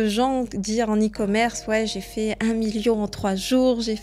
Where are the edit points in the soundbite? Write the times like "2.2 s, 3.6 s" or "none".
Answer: none